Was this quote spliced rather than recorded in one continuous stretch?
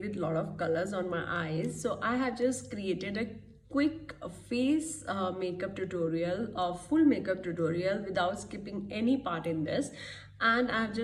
no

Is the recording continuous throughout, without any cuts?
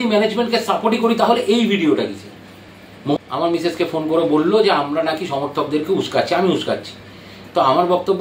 no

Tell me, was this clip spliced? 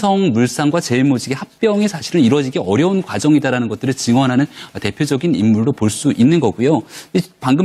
no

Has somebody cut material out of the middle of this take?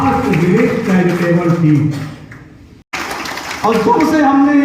yes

